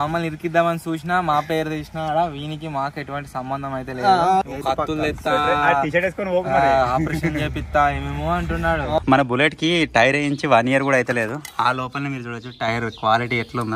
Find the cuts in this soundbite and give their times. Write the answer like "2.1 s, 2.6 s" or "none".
4.5 s, 9.0 s